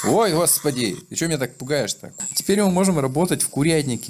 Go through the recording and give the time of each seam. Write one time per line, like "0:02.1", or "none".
0:02.1